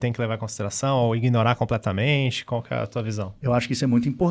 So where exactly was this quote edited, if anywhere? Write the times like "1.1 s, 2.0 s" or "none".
3.3 s